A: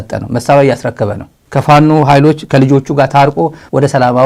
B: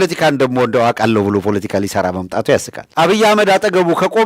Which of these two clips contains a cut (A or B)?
B